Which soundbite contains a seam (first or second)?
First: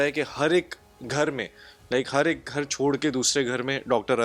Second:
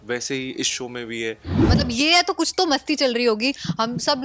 second